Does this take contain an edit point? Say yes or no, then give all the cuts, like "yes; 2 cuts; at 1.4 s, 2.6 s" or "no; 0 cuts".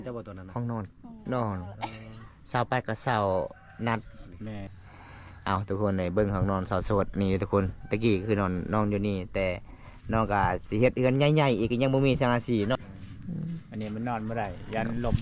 yes; 2 cuts; at 4.7 s, 12.8 s